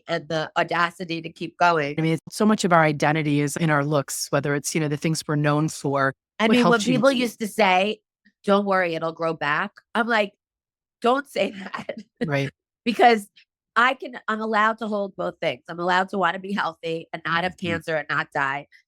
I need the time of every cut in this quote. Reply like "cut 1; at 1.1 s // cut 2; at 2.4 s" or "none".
cut 1; at 2.2 s // cut 2; at 3.5 s